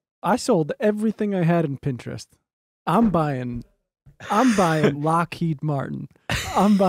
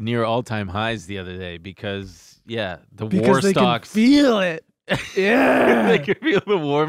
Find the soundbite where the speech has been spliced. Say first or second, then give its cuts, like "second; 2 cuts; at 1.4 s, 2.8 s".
first; 1 cut; at 5.0 s